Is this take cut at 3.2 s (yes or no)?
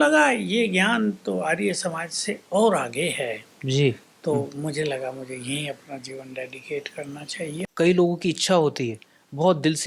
no